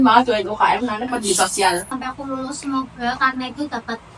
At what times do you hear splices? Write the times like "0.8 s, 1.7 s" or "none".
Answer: 1.9 s

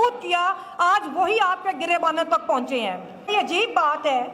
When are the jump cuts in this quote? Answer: 3.3 s

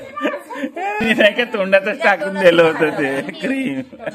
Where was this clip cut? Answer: 1.0 s

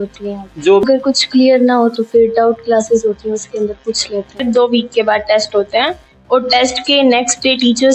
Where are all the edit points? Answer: 0.8 s, 4.4 s

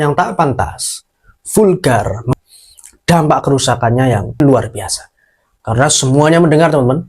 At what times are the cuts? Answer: 2.2 s, 4.4 s

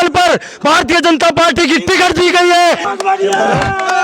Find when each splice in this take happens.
2.8 s

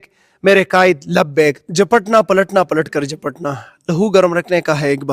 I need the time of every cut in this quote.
1.6 s

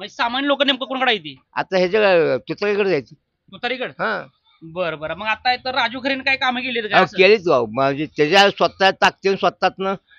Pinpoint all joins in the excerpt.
none

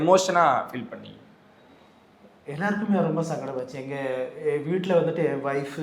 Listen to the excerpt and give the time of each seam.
none

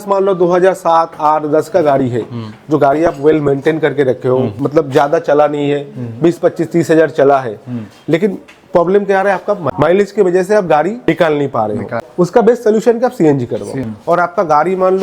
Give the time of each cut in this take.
13.8 s

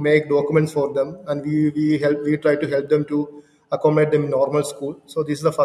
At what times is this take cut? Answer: none

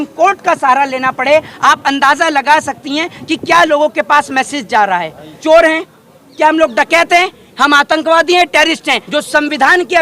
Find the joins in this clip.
5.4 s, 9.0 s

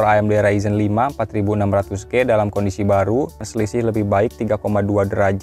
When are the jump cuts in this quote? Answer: 3.5 s

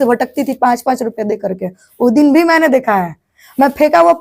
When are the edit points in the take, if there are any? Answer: none

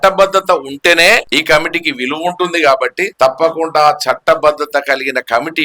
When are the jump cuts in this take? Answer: 1.3 s, 3.0 s

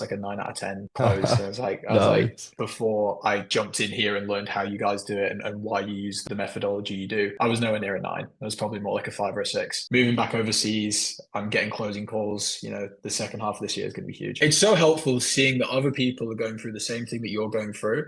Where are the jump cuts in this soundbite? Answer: 2.5 s, 6.2 s, 9.8 s, 14.3 s

